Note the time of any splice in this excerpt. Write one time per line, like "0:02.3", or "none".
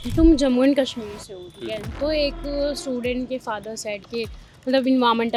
none

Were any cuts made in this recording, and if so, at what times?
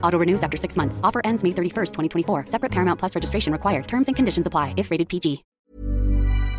0:05.5

